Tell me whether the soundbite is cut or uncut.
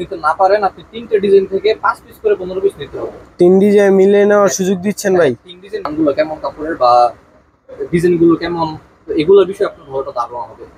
cut